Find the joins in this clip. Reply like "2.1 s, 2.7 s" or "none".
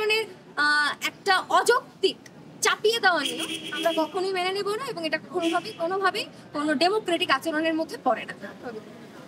none